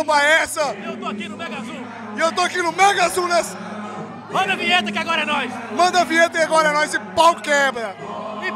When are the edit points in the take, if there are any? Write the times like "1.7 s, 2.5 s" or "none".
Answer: none